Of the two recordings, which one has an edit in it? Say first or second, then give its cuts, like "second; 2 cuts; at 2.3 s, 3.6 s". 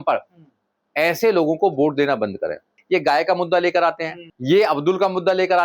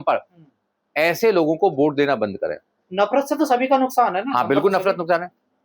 first; 1 cut; at 2.8 s